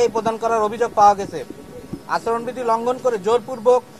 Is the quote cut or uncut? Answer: cut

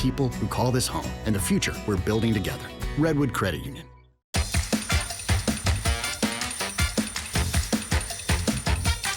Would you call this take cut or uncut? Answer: cut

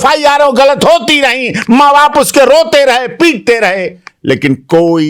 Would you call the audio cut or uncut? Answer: uncut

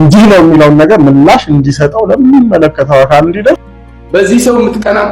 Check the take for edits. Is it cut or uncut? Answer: cut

